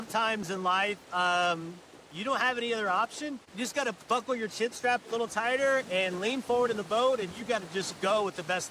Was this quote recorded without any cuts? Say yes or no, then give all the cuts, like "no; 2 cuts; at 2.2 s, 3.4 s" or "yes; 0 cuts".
no; 1 cut; at 3.4 s